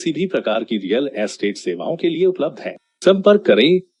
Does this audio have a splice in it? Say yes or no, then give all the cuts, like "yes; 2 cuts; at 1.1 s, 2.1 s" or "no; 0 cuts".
no; 0 cuts